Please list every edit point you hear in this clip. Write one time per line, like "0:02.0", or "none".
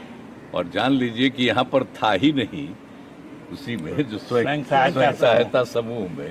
none